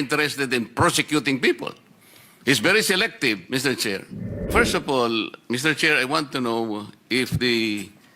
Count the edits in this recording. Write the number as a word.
one